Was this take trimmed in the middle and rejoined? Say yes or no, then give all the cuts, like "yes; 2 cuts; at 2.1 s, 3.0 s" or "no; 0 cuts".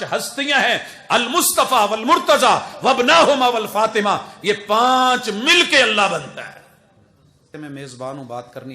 yes; 1 cut; at 7.5 s